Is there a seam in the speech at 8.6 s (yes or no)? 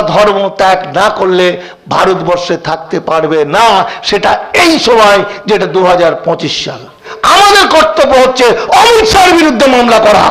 no